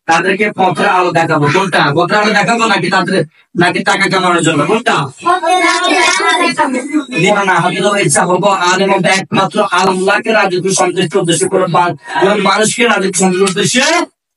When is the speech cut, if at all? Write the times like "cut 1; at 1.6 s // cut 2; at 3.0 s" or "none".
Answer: cut 1; at 7.3 s